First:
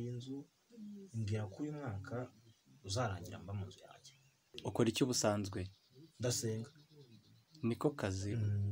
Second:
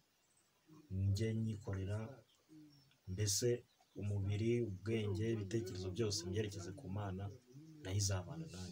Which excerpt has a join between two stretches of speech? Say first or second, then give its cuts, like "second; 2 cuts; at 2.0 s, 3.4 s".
first; 1 cut; at 4.5 s